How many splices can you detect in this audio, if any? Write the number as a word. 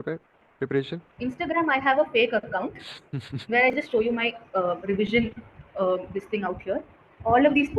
one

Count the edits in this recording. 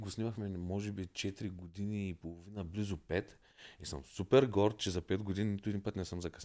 zero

